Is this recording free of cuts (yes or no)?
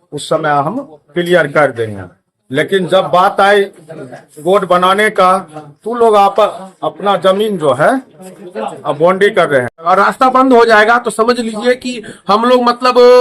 no